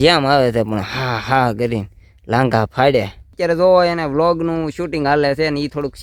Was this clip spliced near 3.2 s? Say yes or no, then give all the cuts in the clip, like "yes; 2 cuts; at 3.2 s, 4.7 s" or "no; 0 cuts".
yes; 1 cut; at 3.2 s